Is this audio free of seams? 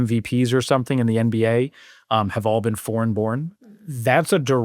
no; 1 cut; at 3.5 s

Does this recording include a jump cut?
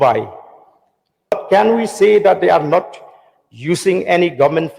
yes; 1 cut; at 1.3 s

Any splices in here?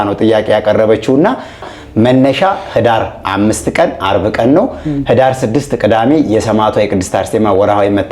yes; 1 cut; at 1.6 s

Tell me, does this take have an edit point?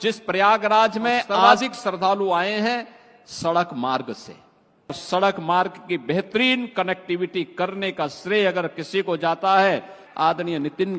yes; 3 cuts; at 1.4 s, 5.0 s, 10.0 s

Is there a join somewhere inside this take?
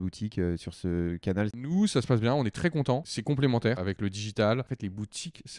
yes; 4 cuts; at 1.6 s, 3.1 s, 3.8 s, 4.7 s

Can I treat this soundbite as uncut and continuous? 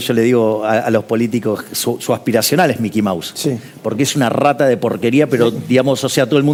yes; 0 cuts

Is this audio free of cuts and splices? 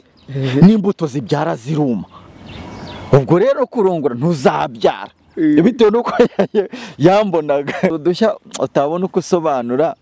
no; 1 cut; at 8.0 s

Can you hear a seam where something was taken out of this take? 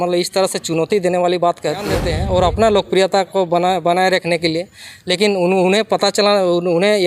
yes; 1 cut; at 2.1 s

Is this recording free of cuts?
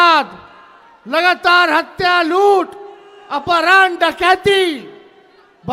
yes; 0 cuts

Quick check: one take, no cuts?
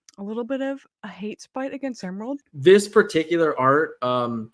no; 1 cut; at 2.4 s

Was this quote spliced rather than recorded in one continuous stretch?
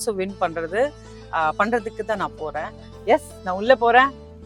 yes; 1 cut; at 2.9 s

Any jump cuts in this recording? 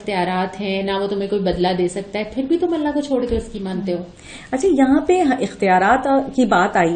no; 0 cuts

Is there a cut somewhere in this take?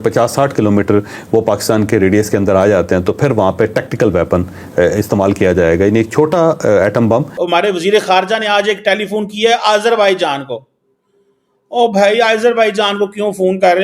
yes; 1 cut; at 7.4 s

